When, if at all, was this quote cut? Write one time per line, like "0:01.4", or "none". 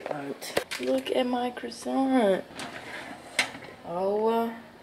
none